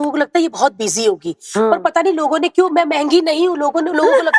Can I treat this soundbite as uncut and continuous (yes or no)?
yes